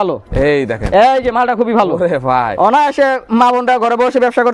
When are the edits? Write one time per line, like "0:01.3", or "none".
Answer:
none